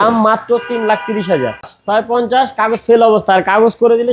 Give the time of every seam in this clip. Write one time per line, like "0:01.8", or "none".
0:01.7